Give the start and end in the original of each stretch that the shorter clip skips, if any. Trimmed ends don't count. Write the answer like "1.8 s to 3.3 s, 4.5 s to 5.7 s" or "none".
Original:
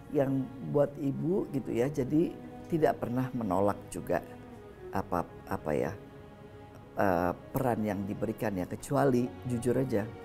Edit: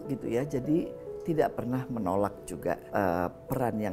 4.3 s to 6.9 s

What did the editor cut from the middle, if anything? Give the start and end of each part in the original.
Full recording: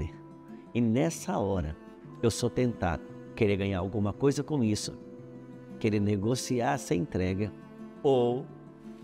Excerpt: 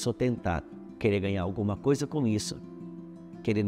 none

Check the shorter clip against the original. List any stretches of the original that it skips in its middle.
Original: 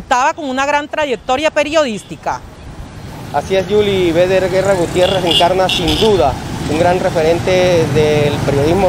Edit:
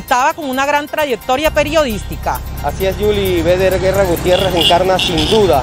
2.5 s to 3.2 s

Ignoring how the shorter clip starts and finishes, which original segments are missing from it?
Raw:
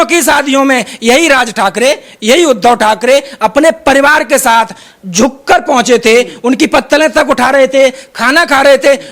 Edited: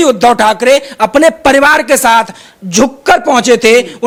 none

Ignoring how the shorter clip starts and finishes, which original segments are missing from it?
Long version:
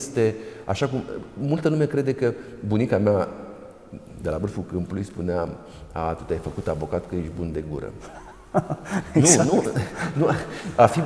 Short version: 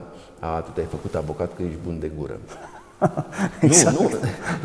none

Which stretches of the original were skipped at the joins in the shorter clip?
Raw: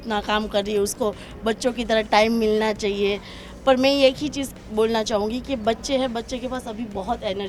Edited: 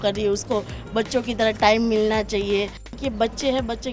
3.5 s to 5.4 s

